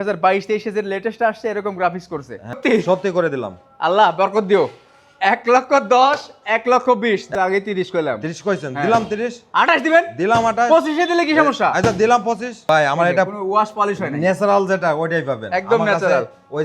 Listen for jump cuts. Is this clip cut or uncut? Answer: cut